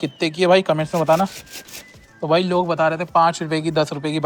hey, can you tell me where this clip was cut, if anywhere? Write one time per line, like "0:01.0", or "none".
none